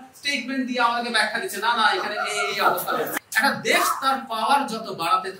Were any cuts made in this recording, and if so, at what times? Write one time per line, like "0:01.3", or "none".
0:03.1